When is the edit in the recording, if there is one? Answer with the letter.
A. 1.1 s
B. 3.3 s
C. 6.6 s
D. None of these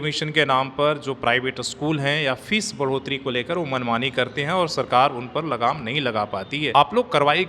C